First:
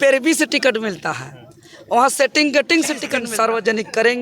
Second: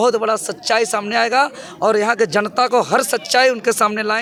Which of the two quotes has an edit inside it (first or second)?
first